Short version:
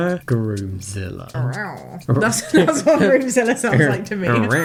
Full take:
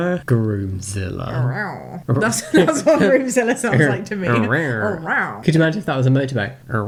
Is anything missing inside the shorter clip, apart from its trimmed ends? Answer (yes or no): no